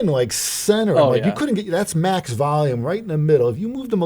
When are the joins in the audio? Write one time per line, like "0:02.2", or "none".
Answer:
none